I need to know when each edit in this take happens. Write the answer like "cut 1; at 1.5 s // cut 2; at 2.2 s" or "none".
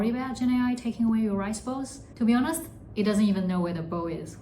cut 1; at 2.0 s

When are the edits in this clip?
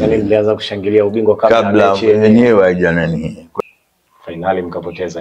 cut 1; at 3.6 s

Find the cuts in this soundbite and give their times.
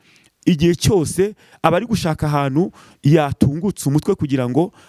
none

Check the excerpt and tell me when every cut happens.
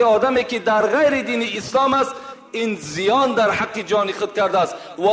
none

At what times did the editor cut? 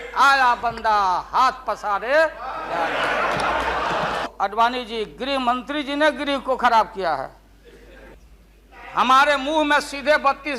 cut 1; at 4.3 s // cut 2; at 8.1 s

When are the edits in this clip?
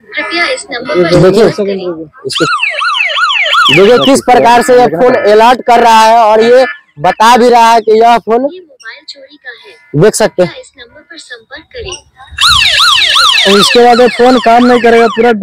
none

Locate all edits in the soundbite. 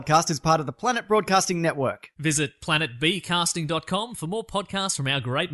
none

